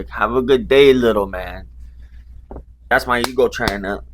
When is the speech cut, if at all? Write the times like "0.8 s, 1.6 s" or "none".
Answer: 2.8 s